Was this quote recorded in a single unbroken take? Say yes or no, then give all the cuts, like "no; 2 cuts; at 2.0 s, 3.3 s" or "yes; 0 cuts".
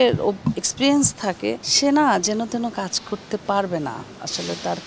no; 1 cut; at 1.7 s